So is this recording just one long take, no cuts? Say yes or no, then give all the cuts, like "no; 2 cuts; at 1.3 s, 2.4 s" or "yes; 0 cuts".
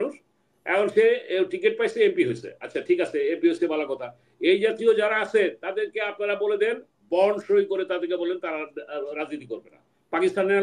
yes; 0 cuts